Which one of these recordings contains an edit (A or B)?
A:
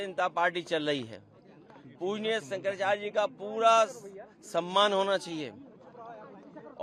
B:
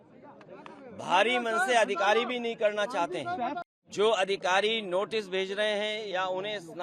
B